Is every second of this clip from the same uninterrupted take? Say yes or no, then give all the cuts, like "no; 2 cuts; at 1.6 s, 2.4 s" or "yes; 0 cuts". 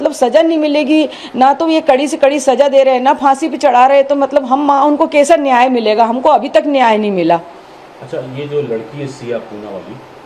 yes; 0 cuts